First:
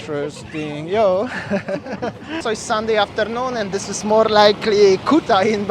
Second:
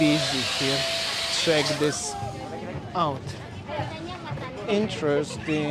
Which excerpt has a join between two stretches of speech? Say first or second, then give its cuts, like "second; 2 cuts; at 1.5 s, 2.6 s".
first; 1 cut; at 2.4 s